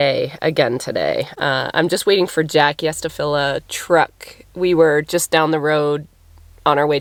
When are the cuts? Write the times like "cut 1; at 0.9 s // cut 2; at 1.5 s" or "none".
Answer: none